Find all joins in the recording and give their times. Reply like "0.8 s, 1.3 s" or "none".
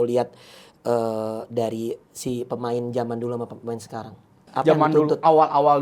4.4 s

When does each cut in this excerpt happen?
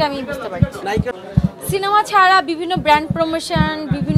1.2 s

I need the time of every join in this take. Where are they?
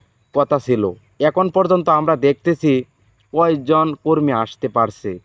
none

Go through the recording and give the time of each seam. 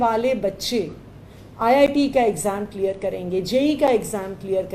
none

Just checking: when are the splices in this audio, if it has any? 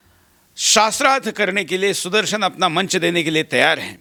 none

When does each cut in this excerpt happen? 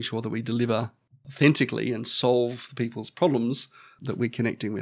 3.9 s

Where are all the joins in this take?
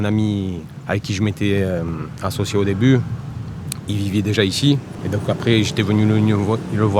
none

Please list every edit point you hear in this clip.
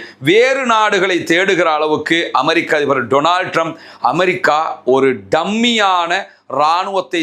none

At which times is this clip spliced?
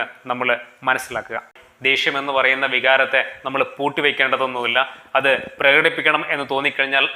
1.7 s

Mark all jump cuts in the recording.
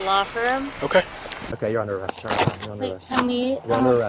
1.4 s

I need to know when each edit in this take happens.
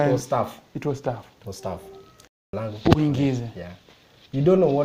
2.4 s

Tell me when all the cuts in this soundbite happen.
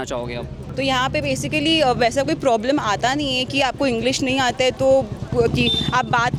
none

